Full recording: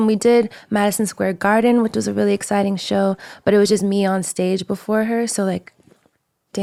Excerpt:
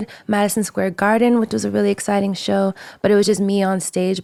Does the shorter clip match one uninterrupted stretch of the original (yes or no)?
yes